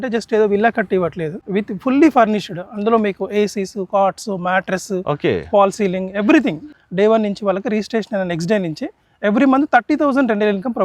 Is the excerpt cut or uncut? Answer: cut